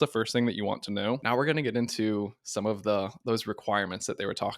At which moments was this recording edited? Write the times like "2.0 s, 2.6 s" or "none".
1.2 s